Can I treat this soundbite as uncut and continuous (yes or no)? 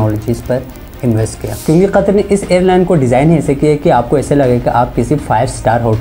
no